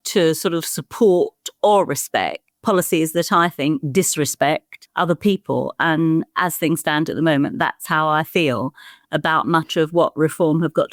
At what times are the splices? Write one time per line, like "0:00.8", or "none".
none